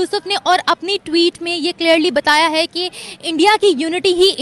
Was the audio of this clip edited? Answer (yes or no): no